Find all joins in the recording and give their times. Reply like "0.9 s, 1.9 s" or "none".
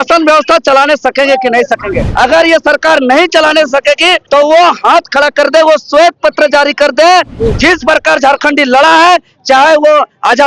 2.1 s, 4.2 s